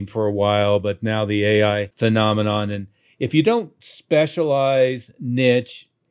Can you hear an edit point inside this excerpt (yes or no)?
yes